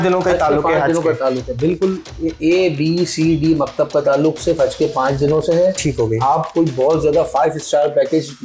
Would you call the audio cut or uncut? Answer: uncut